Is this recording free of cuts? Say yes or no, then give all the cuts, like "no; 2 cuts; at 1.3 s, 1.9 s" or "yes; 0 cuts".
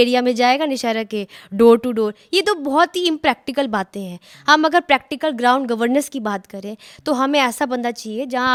yes; 0 cuts